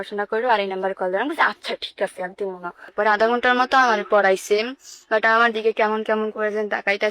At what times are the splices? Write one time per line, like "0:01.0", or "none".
0:02.9